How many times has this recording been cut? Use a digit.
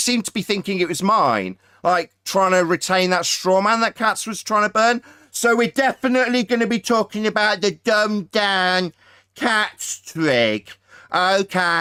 0